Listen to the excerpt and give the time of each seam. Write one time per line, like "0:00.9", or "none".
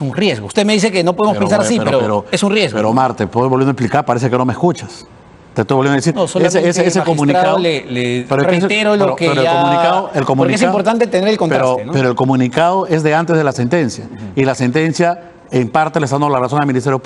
none